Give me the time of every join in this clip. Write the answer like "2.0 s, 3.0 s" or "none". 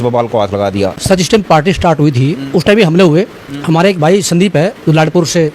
1.0 s